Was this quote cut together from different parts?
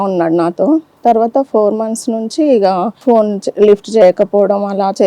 yes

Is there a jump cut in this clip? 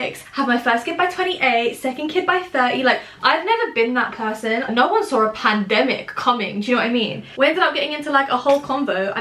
yes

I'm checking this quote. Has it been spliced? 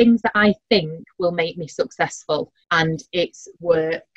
yes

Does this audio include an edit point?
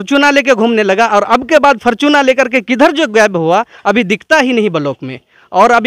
no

